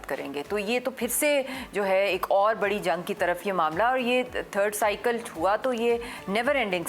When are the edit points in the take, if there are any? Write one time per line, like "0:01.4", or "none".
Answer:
none